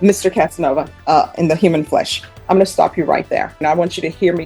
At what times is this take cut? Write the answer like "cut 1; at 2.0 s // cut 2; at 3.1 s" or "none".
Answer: cut 1; at 0.9 s // cut 2; at 3.6 s